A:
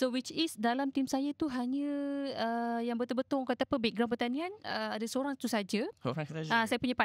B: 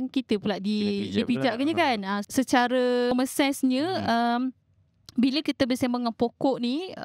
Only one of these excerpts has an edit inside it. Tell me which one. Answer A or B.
B